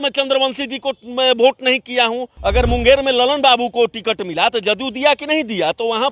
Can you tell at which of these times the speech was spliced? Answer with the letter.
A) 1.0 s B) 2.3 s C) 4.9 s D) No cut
B